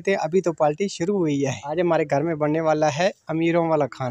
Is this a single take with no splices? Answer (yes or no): no